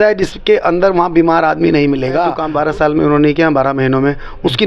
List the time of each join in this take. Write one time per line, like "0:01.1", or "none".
0:02.4